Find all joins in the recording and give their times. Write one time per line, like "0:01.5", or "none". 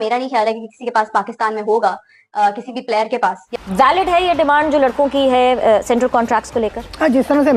0:03.5